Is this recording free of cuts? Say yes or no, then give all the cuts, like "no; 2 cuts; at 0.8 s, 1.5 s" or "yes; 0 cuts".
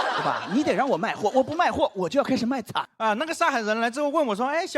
no; 1 cut; at 2.9 s